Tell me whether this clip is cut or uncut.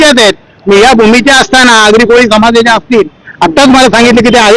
uncut